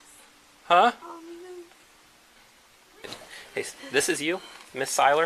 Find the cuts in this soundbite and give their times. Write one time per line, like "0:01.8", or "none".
0:03.0